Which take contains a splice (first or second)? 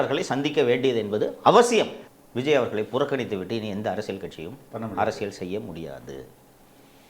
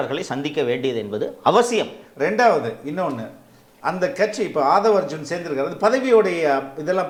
first